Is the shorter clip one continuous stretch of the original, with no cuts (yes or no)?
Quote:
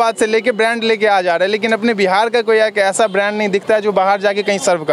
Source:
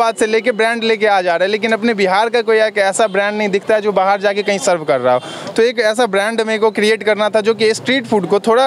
yes